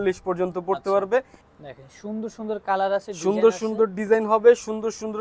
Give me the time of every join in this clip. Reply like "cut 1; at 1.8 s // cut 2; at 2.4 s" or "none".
cut 1; at 1.4 s